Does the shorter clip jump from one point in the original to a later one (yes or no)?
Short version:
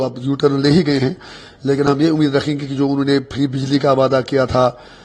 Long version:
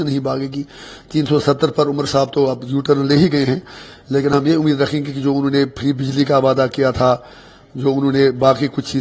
no